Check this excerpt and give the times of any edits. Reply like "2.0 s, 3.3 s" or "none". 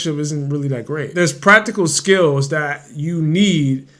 1.1 s